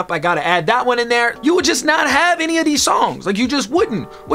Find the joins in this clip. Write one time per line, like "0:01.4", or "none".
0:01.3

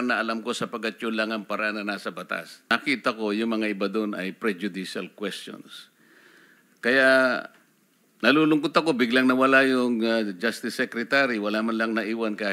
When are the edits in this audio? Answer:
0:02.7

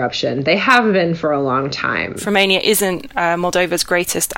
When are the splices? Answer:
0:02.2

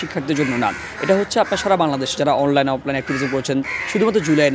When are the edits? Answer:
none

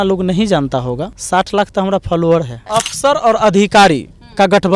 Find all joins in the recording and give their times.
0:01.1
0:02.6

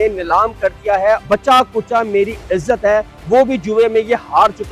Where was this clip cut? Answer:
0:01.2

